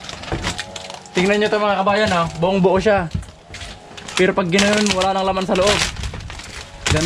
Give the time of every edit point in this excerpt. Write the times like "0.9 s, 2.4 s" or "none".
none